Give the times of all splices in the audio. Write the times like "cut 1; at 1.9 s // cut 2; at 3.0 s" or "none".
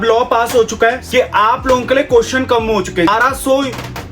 cut 1; at 1.0 s // cut 2; at 3.1 s